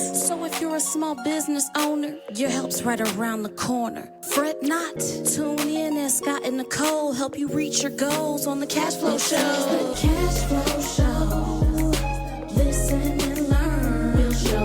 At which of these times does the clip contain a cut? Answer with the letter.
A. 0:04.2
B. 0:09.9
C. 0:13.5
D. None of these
B